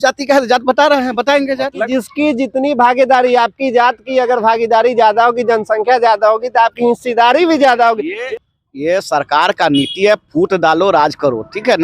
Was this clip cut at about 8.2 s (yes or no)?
yes